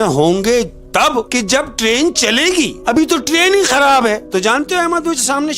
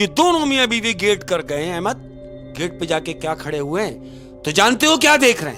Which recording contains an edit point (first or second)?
first